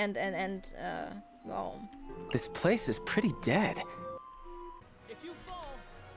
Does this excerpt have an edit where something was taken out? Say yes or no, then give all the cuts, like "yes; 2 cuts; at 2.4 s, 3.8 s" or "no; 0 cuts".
yes; 1 cut; at 4.9 s